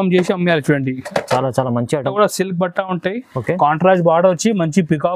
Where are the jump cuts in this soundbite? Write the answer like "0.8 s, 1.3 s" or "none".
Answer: 2.0 s